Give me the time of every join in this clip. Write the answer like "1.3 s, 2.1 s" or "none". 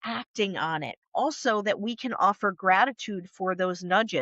1.0 s